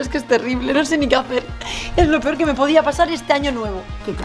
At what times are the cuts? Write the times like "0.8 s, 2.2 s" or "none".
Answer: none